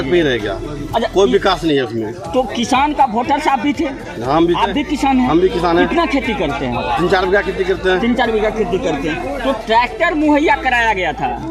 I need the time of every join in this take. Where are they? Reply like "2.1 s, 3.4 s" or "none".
none